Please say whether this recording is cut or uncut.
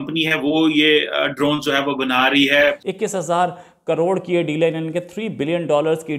cut